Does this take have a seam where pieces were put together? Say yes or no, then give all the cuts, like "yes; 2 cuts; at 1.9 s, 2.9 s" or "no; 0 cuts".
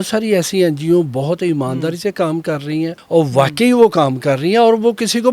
yes; 1 cut; at 3.0 s